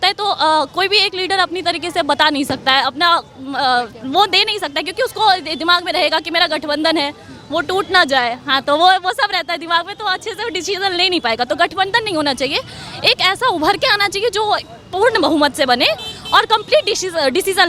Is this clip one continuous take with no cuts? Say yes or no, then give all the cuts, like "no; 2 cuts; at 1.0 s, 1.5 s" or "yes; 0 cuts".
yes; 0 cuts